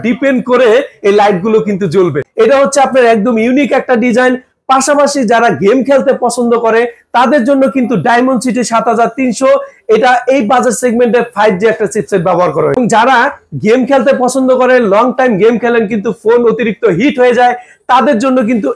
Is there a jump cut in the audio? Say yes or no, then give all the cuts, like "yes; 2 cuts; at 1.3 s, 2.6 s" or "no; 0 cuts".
yes; 2 cuts; at 2.2 s, 12.8 s